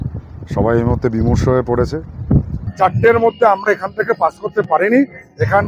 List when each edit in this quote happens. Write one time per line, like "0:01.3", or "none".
0:02.6

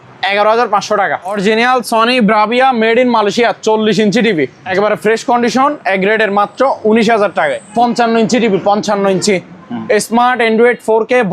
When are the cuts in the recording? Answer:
0:01.3
0:04.6
0:07.6

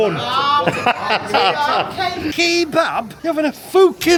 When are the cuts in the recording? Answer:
none

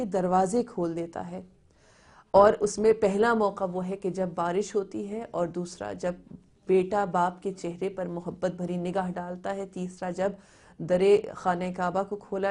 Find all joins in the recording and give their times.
0:03.6

